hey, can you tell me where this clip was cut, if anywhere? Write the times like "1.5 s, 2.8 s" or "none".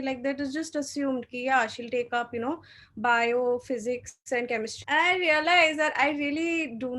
4.7 s